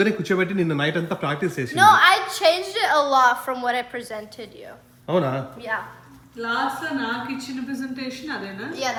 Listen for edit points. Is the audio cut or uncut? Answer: uncut